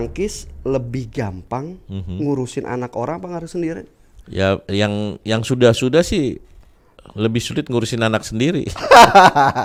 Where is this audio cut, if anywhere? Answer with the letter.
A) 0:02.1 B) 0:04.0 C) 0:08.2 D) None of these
D